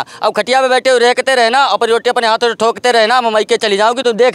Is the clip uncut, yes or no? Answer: yes